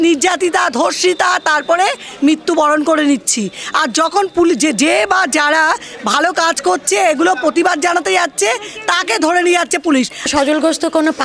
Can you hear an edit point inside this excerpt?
yes; 1 cut; at 10.3 s

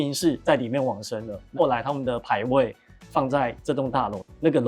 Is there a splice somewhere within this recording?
no; 0 cuts

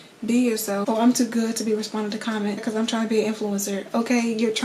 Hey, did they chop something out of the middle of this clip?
yes; 2 cuts; at 0.8 s, 2.6 s

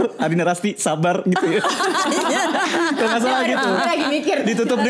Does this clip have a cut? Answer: no; 0 cuts

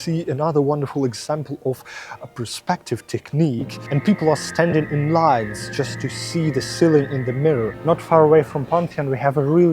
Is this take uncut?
no; 1 cut; at 7.8 s

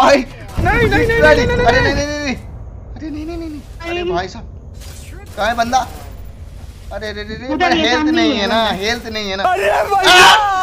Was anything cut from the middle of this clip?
no; 0 cuts

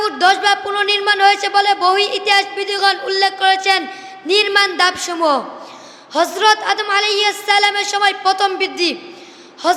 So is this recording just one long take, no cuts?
yes; 0 cuts

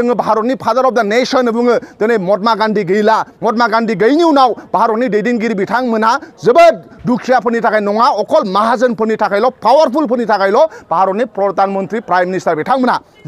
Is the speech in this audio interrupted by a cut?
no; 0 cuts

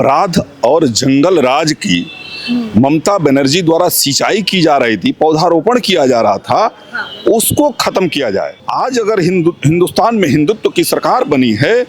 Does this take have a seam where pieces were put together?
yes; 1 cut; at 8.6 s

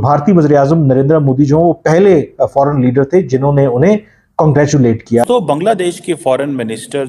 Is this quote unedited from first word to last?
no; 1 cut; at 5.2 s

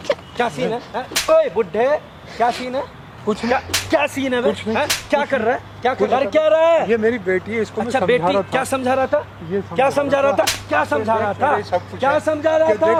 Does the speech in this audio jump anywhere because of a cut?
no; 0 cuts

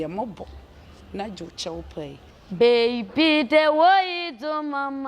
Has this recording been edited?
yes; 1 cut; at 2.3 s

